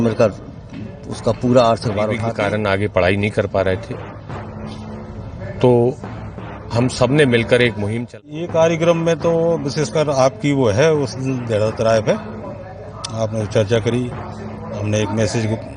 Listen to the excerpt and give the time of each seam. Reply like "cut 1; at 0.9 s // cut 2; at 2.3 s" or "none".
cut 1; at 2.3 s // cut 2; at 8.2 s